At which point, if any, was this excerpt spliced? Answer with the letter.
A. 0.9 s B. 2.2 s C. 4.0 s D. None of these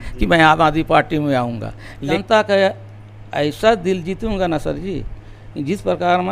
B